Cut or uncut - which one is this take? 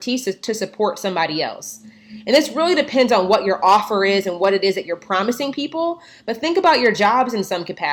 uncut